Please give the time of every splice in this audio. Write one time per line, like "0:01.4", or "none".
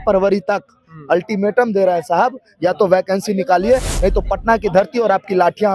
none